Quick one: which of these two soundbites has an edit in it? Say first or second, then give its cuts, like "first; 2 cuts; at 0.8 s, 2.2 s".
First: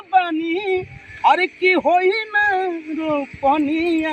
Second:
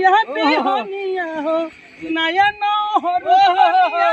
second; 1 cut; at 2.1 s